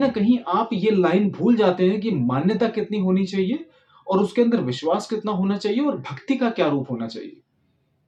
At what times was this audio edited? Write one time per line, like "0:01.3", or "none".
none